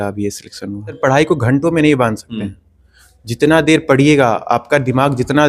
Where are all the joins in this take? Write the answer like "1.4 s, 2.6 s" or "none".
1.0 s